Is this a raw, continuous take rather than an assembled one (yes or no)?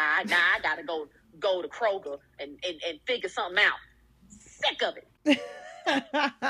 yes